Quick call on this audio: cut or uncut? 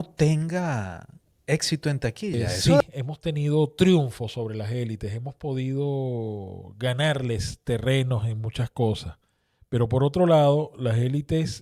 cut